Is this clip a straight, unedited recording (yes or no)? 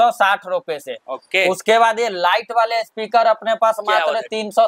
yes